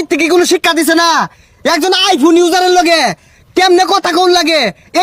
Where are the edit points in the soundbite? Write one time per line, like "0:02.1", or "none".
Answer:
none